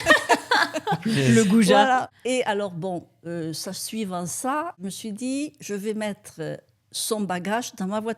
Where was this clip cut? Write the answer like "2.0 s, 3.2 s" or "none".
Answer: 2.1 s, 4.8 s